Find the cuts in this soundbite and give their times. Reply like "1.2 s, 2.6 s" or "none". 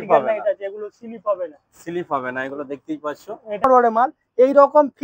3.6 s